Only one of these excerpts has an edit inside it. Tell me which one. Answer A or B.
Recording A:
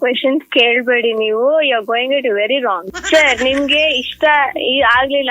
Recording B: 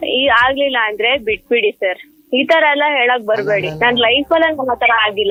A